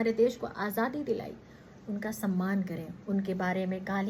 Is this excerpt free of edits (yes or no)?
yes